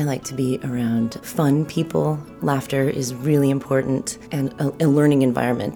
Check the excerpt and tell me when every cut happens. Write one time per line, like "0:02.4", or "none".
0:01.2
0:02.3
0:04.2